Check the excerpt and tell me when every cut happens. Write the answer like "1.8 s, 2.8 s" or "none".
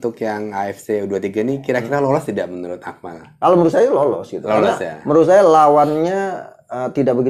none

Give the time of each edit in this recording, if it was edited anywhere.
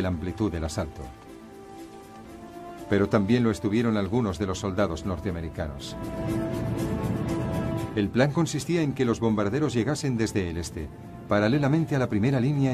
none

